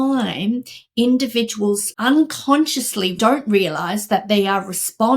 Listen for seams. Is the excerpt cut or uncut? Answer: cut